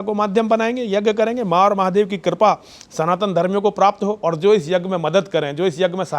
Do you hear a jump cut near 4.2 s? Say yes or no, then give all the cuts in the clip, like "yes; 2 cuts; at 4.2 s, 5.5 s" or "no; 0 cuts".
yes; 1 cut; at 4.2 s